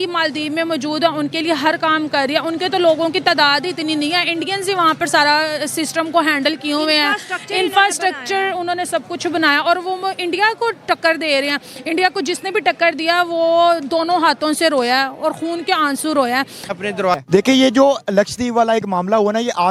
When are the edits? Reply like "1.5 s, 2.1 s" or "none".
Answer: 17.2 s